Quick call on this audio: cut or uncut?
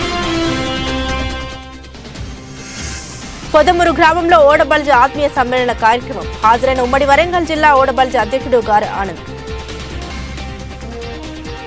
cut